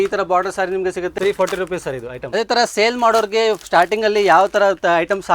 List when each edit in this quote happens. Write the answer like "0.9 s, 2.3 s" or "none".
1.1 s, 2.2 s